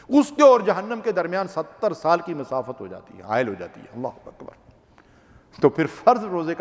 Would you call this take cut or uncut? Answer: uncut